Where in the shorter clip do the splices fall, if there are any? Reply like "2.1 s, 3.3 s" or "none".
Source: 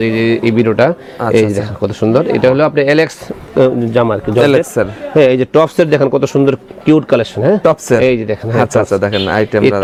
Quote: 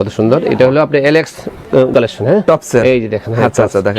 1.9 s